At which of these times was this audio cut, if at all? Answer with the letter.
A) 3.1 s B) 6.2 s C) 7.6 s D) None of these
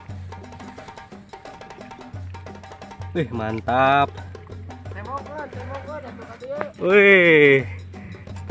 A